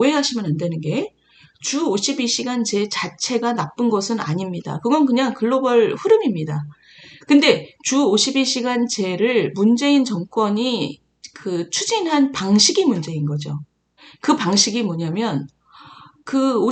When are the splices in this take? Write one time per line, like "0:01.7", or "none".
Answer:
none